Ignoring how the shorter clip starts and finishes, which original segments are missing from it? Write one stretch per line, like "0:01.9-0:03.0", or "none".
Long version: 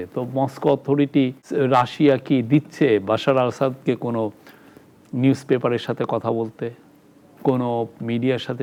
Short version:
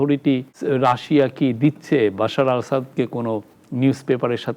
0:04.5-0:05.0